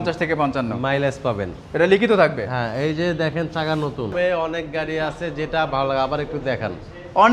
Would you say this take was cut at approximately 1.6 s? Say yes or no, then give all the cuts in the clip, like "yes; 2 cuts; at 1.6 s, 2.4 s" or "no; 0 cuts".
no; 1 cut; at 4.1 s